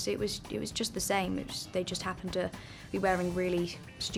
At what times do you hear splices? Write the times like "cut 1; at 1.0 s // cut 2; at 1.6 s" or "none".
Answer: none